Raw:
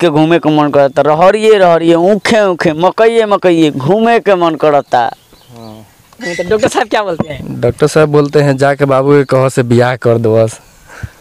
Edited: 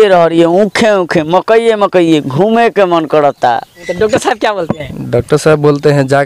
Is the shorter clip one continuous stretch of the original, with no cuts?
no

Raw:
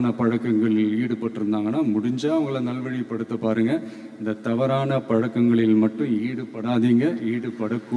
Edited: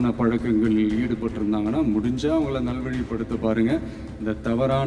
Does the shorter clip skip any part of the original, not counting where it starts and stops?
no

